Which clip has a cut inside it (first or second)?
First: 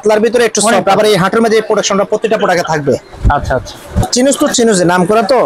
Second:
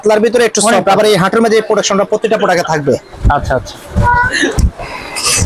first